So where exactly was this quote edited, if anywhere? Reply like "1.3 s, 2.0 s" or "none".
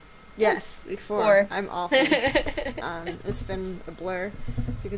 none